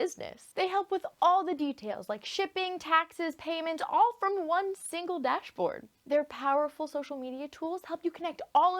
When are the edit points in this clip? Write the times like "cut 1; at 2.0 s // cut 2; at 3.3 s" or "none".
cut 1; at 5.9 s